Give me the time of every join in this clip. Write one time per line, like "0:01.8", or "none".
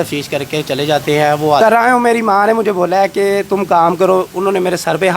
0:01.6